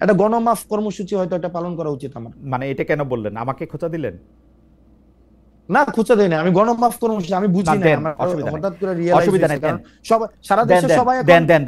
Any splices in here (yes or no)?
no